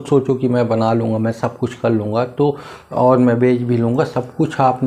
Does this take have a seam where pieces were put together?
no; 0 cuts

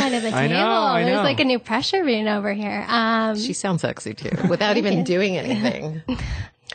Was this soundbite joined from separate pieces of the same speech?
no; 0 cuts

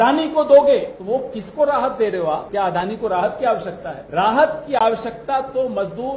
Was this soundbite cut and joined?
yes; 3 cuts; at 0.9 s, 2.4 s, 3.9 s

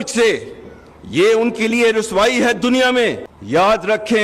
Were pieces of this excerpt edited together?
yes; 1 cut; at 3.3 s

